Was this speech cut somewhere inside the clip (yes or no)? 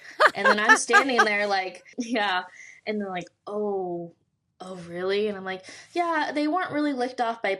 yes